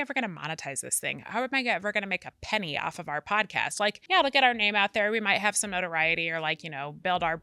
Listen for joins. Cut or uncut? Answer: cut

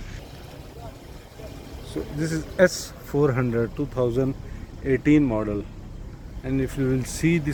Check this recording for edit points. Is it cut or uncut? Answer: uncut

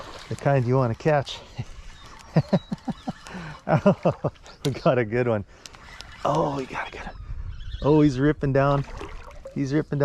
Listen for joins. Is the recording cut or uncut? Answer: uncut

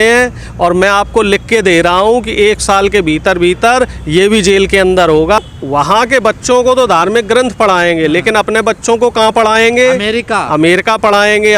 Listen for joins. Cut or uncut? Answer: cut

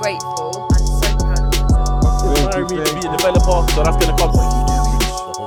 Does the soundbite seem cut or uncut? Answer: uncut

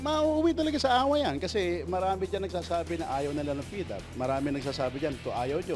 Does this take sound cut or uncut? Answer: cut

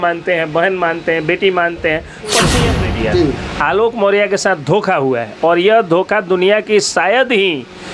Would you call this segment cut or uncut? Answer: cut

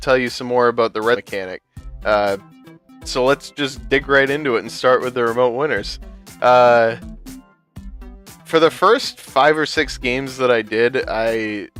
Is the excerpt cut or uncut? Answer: uncut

